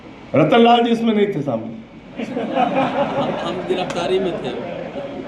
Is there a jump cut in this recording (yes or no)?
no